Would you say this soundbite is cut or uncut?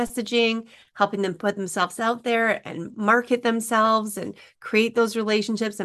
uncut